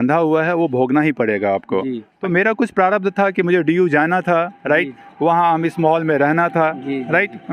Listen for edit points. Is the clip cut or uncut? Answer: cut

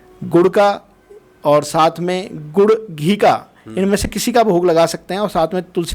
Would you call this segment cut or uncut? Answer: uncut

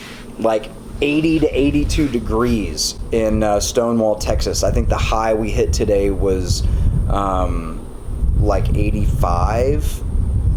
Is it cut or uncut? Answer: uncut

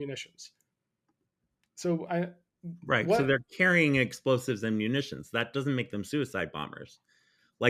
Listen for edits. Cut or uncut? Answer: uncut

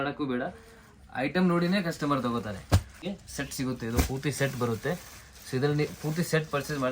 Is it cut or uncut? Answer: cut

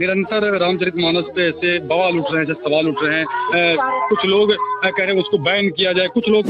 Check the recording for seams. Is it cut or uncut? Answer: uncut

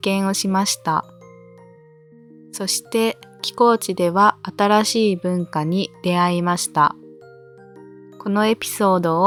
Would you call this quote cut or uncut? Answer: uncut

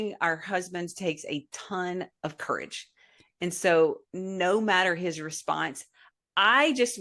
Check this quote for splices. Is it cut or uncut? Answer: uncut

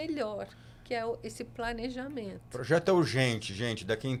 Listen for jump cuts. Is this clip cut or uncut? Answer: uncut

